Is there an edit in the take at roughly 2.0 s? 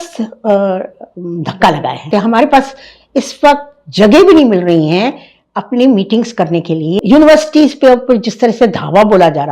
yes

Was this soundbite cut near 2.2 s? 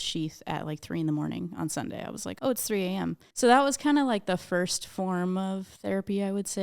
yes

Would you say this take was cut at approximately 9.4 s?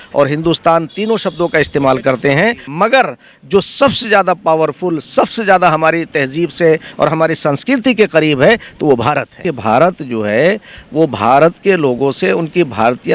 yes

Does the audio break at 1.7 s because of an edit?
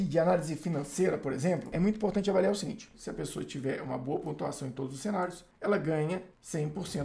yes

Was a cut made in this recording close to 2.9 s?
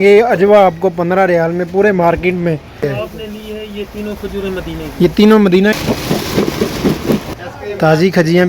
yes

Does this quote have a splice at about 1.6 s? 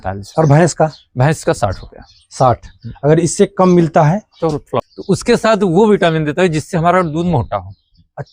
no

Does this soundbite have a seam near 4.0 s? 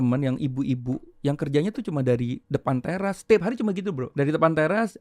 yes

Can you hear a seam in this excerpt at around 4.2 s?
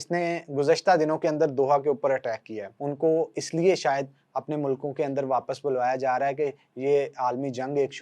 no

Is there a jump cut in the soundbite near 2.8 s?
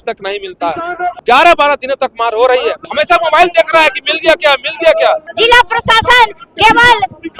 yes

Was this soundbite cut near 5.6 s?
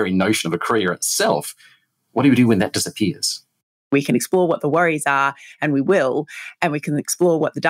no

